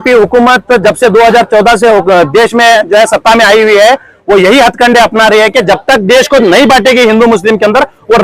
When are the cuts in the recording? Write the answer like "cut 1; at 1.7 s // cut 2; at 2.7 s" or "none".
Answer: none